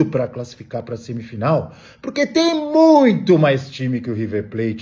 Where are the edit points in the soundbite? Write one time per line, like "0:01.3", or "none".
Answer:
none